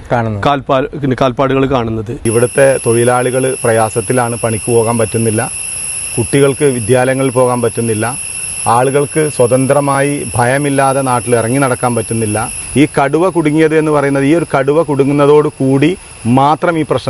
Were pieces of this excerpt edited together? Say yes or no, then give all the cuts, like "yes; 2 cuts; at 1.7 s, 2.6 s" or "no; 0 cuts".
yes; 2 cuts; at 2.1 s, 12.6 s